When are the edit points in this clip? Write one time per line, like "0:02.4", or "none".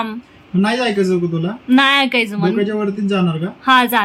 none